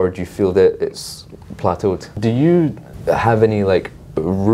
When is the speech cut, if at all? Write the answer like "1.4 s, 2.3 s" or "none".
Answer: 2.1 s, 2.9 s